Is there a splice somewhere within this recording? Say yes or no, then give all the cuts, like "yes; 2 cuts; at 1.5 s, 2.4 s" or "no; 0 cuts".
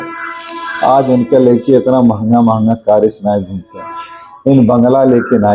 no; 0 cuts